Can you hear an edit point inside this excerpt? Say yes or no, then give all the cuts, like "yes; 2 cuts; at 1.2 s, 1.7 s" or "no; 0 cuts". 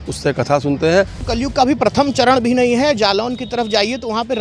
yes; 1 cut; at 1.2 s